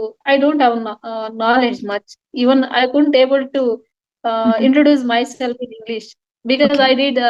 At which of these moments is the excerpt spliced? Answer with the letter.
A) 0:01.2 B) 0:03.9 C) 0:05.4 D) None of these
D